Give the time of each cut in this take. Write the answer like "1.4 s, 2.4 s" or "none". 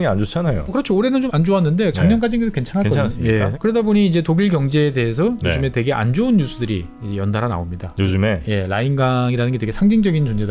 1.0 s, 3.5 s